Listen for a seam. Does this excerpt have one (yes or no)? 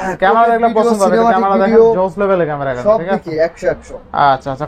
no